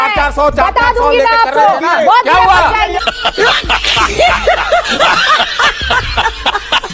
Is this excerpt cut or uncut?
uncut